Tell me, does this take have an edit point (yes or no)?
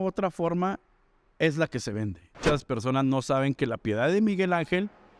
yes